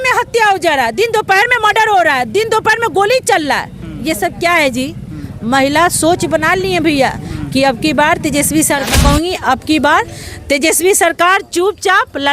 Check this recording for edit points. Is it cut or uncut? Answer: cut